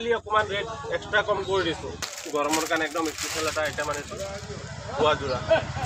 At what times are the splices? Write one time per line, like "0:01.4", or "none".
0:02.1